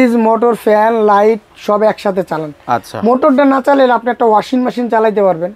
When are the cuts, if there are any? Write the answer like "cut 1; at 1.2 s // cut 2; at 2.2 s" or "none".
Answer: none